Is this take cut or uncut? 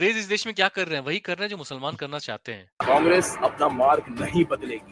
cut